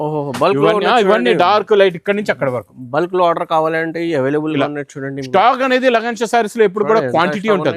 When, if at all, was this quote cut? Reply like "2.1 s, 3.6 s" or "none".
none